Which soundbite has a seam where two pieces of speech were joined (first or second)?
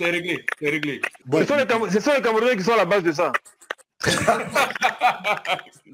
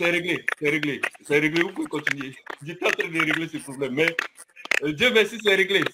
first